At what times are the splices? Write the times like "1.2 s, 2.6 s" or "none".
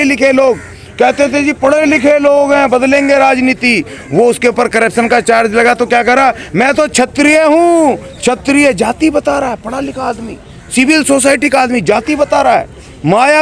none